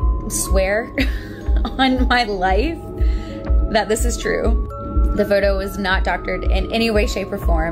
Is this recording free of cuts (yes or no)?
yes